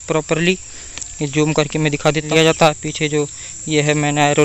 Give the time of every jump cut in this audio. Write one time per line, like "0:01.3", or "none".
0:02.3